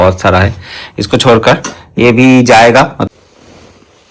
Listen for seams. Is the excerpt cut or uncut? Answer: cut